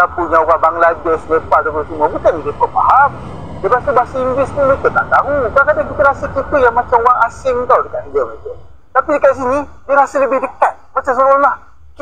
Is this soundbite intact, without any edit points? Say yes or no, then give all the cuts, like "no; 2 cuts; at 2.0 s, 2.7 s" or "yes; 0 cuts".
yes; 0 cuts